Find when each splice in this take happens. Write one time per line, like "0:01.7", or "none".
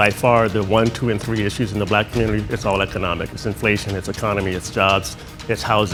none